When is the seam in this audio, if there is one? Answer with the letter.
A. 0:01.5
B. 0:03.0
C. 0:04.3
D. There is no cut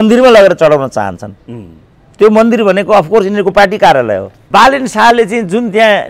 C